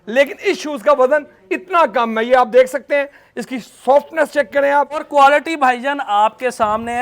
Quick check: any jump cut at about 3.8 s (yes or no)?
no